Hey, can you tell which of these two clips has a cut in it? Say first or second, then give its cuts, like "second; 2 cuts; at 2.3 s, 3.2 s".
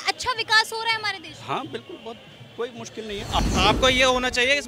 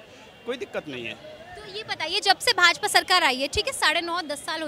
first; 1 cut; at 3.4 s